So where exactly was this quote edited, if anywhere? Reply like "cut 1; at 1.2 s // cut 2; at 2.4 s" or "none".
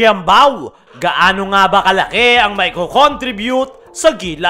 none